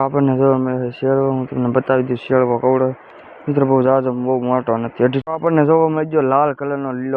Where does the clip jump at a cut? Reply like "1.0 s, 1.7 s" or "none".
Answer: 5.2 s